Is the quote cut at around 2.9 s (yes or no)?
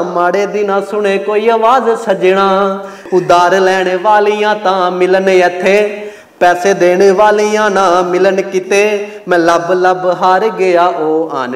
yes